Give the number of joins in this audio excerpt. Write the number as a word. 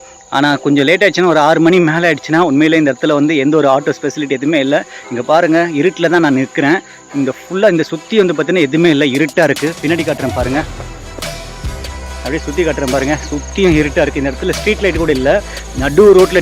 zero